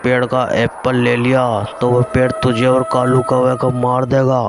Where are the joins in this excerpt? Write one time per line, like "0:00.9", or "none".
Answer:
none